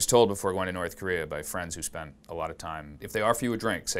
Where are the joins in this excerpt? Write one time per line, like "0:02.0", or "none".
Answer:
0:03.0